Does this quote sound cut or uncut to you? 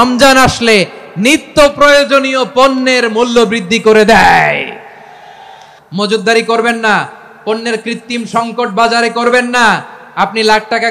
cut